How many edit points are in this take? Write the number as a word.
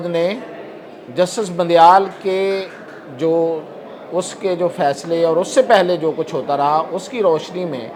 zero